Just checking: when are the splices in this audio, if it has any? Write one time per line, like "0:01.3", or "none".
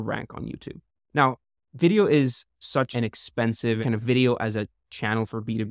0:02.9
0:03.8